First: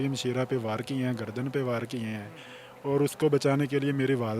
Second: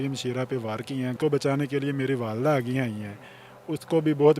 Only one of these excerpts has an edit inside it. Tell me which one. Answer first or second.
second